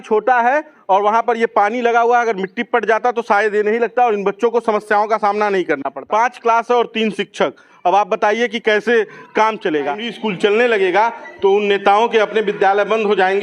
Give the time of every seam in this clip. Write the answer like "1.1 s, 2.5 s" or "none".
5.9 s, 10.1 s